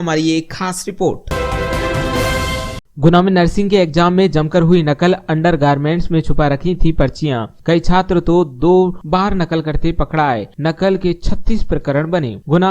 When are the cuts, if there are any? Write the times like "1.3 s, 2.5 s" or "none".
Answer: 1.2 s, 2.8 s